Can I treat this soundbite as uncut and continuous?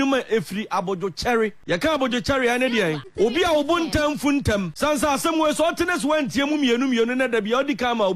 no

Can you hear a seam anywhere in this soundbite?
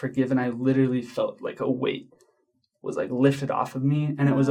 no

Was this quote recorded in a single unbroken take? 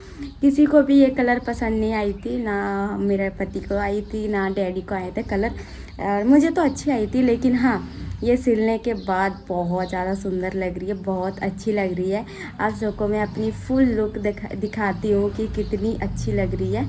yes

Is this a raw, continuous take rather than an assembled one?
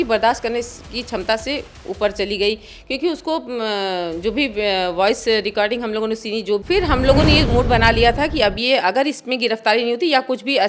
no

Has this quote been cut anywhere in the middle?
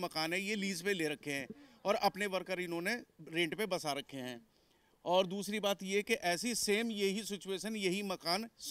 no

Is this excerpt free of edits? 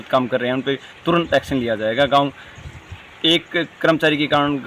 yes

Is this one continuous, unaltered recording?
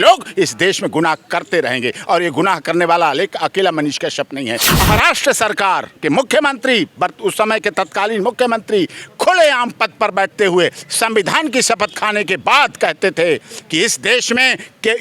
no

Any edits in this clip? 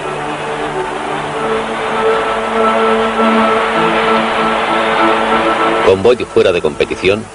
yes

